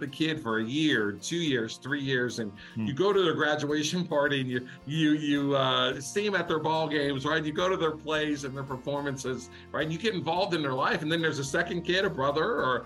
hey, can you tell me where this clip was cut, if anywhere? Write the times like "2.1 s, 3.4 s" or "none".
none